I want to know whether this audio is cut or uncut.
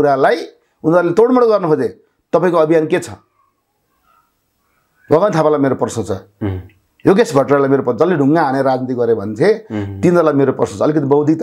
uncut